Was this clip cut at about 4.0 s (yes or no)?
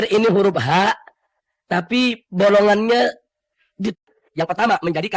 yes